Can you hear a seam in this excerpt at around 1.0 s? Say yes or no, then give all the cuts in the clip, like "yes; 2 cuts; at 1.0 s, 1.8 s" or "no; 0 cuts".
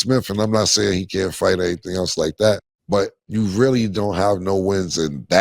no; 1 cut; at 3.1 s